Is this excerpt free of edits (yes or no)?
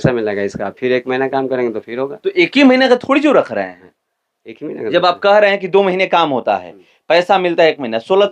yes